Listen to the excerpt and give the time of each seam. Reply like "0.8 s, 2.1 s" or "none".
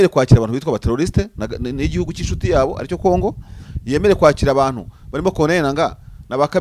none